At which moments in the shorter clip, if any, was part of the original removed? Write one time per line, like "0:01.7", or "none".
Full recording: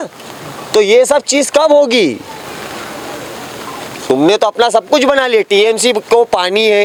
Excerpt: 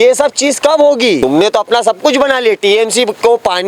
0:01.2